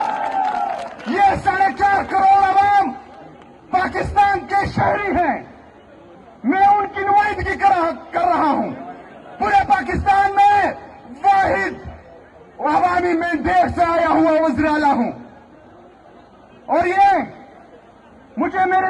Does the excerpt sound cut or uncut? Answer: uncut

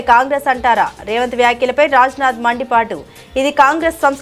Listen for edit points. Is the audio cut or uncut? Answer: uncut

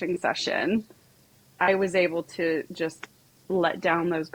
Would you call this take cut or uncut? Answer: uncut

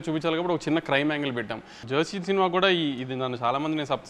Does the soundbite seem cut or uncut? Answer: cut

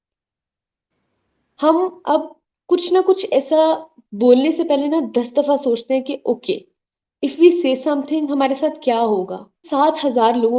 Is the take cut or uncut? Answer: cut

